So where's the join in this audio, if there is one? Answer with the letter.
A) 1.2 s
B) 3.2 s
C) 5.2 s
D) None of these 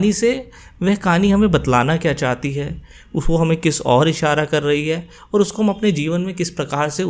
D